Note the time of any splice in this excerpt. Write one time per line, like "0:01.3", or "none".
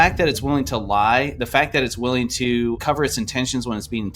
0:02.8